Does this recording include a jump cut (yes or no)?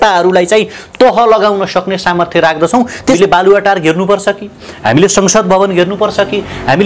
yes